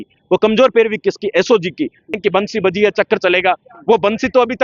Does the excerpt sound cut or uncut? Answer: cut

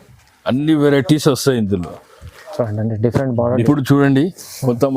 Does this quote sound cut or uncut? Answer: cut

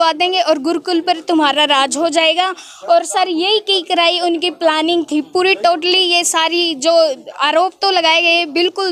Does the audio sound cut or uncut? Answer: uncut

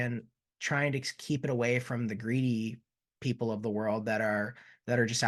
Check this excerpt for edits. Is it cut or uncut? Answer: uncut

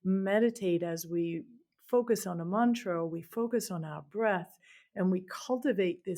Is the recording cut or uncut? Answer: uncut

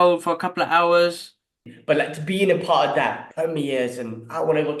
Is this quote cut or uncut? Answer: cut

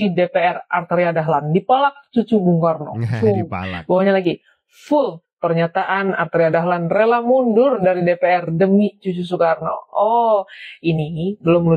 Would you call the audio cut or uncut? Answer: uncut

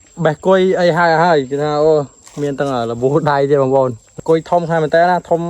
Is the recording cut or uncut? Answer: cut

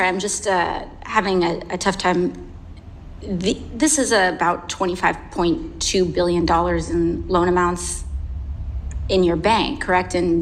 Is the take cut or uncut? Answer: uncut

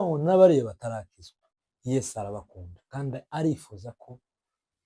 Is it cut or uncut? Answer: uncut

